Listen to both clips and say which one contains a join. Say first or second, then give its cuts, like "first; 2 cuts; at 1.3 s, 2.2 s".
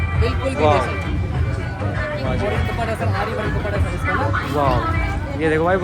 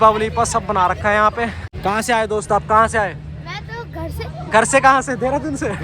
second; 1 cut; at 1.6 s